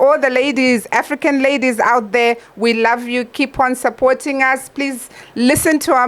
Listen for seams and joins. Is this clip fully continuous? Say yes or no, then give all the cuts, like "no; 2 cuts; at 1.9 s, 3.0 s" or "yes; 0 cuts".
yes; 0 cuts